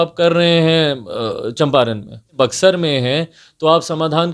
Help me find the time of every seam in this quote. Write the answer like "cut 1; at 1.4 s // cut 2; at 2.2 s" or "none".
cut 1; at 2.3 s